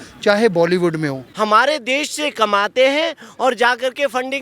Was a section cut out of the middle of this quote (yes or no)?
yes